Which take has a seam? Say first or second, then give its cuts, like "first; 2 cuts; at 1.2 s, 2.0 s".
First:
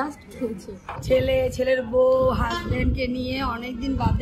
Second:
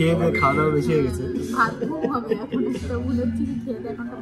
first; 1 cut; at 1.0 s